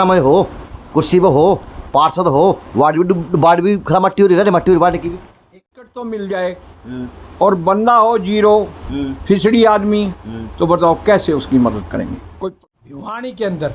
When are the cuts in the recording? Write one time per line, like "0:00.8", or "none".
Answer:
0:05.5
0:12.3

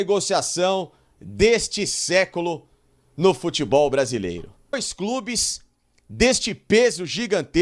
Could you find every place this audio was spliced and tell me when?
0:04.9

